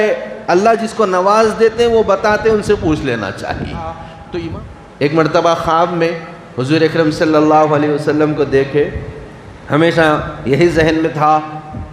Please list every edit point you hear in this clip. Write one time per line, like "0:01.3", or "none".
0:04.5